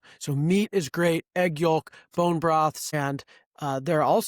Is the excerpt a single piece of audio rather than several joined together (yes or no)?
no